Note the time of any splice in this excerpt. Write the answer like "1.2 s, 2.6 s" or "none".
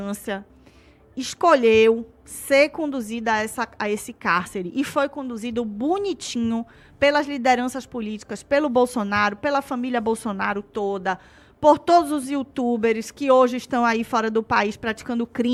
none

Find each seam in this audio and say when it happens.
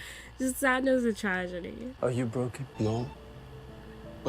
1.9 s

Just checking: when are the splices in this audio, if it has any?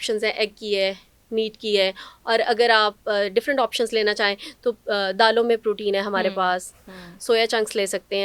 none

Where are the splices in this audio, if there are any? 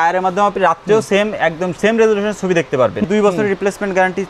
3.0 s

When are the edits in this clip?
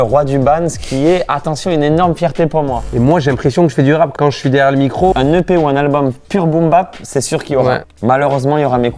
2.9 s, 4.1 s, 5.1 s, 7.9 s

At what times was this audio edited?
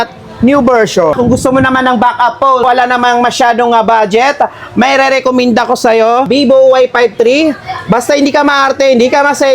1.1 s, 2.6 s, 6.3 s

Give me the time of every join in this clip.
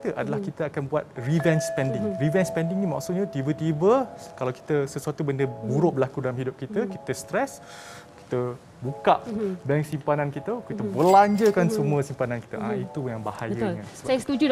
none

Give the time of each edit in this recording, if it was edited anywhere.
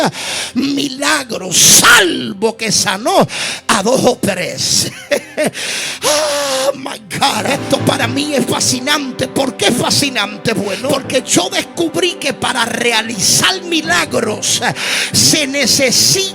10.8 s

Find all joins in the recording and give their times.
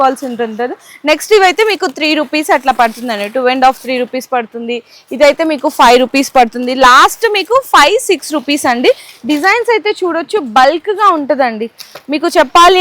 none

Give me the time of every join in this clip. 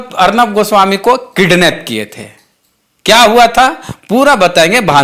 none

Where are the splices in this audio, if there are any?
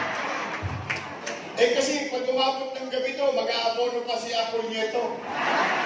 none

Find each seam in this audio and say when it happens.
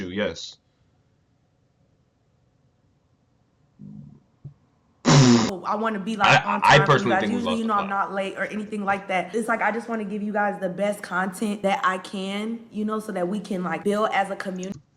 5.6 s

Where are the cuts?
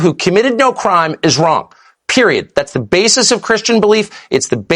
none

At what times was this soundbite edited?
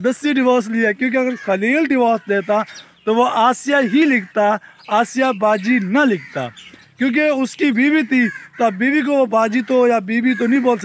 none

